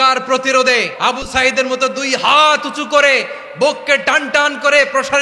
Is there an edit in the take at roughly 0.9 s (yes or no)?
yes